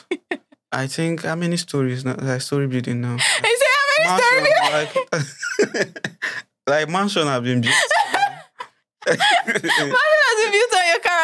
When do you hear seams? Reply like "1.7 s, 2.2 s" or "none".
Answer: none